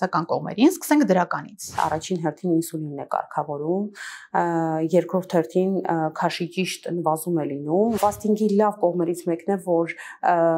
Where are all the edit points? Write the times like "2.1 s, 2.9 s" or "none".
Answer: 1.8 s, 8.0 s